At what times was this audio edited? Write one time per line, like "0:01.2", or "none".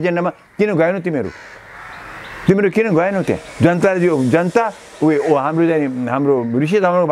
none